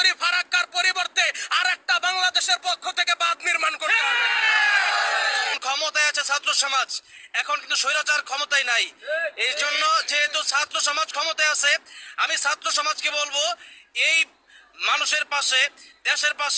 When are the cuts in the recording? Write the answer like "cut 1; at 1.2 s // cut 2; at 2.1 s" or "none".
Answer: cut 1; at 5.6 s